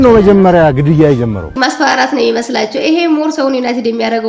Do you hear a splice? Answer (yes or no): yes